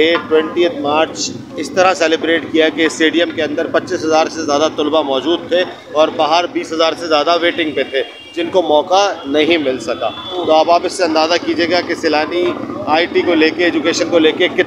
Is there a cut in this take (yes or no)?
no